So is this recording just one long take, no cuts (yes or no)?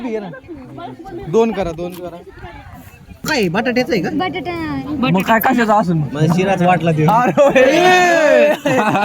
no